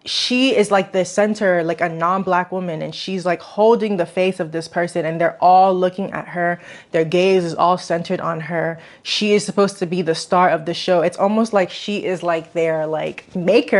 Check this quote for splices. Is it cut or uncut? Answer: uncut